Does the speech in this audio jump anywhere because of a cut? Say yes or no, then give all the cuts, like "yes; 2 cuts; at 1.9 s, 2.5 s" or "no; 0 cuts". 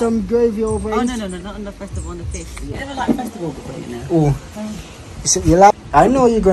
yes; 2 cuts; at 2.7 s, 5.7 s